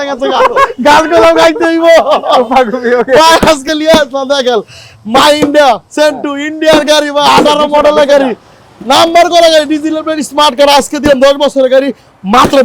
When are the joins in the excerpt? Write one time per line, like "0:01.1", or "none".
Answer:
none